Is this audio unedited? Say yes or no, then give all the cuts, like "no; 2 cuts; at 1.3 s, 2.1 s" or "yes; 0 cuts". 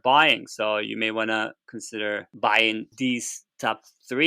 no; 2 cuts; at 2.3 s, 2.9 s